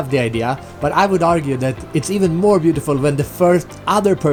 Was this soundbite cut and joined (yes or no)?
no